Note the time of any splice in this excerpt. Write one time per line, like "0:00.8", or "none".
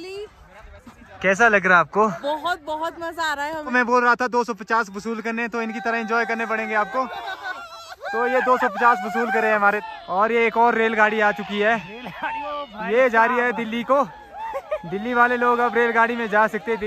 0:03.7
0:09.8